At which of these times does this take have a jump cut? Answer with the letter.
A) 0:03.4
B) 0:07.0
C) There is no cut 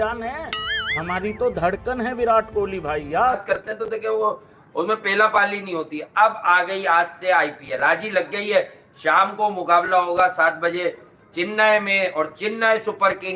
A